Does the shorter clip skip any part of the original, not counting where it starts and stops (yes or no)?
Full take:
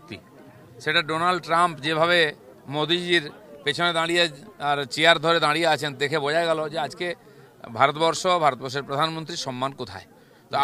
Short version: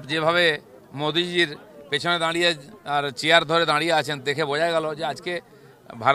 no